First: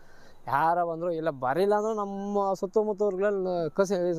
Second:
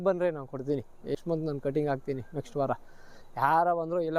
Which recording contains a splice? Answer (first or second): second